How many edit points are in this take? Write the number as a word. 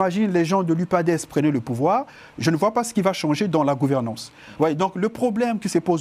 zero